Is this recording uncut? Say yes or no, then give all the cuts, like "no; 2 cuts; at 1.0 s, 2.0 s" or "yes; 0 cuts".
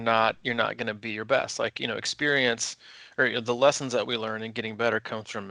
yes; 0 cuts